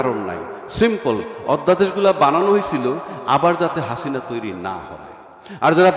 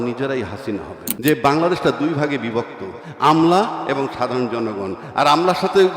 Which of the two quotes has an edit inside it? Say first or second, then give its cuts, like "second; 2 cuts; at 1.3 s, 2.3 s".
second; 1 cut; at 1.0 s